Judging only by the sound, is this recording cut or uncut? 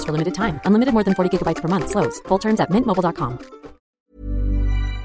cut